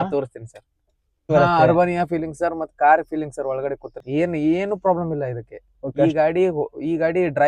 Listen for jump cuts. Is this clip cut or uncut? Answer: cut